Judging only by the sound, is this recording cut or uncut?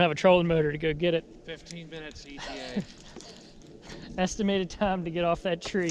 uncut